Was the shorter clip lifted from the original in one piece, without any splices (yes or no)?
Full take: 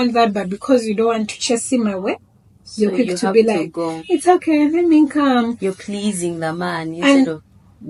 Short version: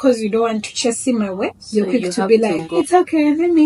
no